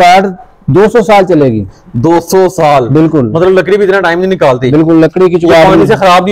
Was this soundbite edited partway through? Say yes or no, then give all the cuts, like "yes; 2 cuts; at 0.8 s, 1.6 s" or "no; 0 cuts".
no; 0 cuts